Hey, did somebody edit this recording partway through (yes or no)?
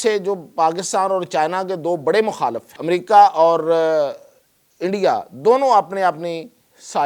yes